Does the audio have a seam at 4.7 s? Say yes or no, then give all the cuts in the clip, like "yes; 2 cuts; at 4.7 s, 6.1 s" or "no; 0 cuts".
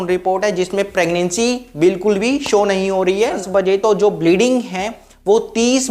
no; 1 cut; at 3.4 s